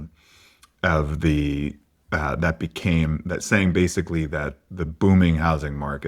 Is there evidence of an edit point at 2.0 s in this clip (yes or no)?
no